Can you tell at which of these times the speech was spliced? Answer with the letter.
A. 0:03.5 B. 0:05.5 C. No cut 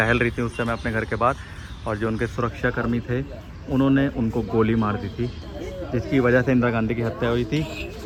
C